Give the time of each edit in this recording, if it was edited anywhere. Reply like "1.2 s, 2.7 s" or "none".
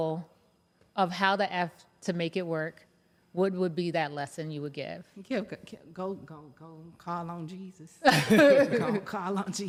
none